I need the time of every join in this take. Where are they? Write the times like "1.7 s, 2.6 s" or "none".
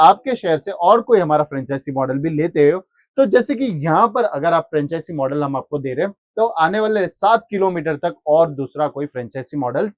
none